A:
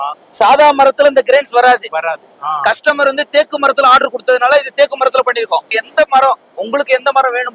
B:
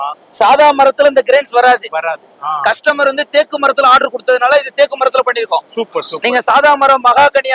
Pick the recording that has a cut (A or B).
A